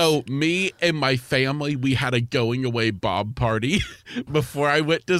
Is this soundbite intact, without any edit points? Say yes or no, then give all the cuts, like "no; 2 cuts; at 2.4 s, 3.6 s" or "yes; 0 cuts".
no; 1 cut; at 4.3 s